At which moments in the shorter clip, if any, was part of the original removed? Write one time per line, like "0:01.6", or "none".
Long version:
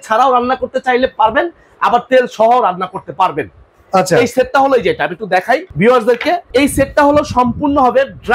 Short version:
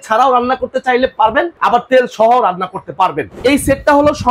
0:01.5
0:03.3